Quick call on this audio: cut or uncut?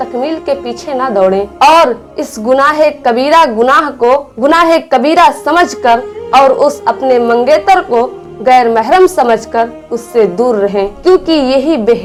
uncut